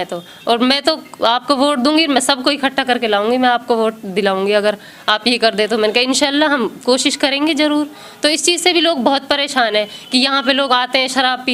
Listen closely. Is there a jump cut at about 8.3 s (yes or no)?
no